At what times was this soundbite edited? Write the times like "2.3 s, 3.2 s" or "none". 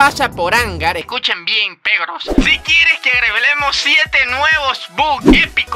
2.4 s